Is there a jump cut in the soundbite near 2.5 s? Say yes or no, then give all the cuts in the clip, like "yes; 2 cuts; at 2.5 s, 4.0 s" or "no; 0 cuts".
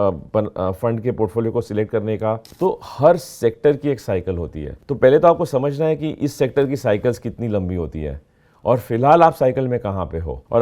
yes; 1 cut; at 2.5 s